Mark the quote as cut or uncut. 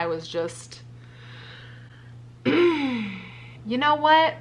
cut